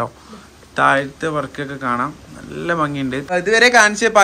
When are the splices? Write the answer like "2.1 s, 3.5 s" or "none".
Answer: 3.3 s